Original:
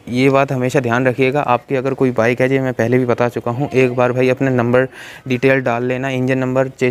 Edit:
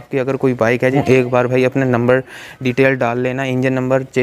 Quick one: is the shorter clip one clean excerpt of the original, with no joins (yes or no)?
no